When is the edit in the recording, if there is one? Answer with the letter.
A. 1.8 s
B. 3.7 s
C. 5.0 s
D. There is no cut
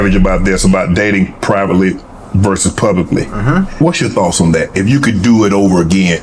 B